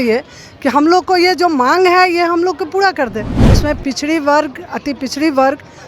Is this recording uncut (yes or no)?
no